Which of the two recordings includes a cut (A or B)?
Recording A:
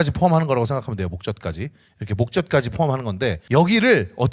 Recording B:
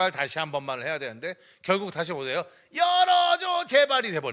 A